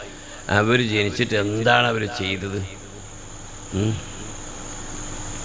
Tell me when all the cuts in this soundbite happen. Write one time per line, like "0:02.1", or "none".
none